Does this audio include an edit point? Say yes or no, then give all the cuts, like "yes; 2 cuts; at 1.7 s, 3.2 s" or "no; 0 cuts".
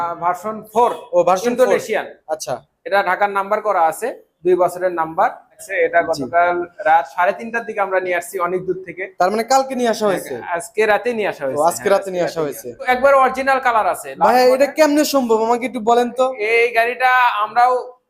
yes; 2 cuts; at 5.6 s, 12.9 s